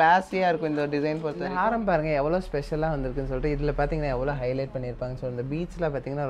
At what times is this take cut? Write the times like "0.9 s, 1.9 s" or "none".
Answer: 1.5 s